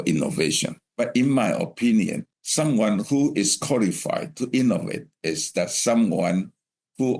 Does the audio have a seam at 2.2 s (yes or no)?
yes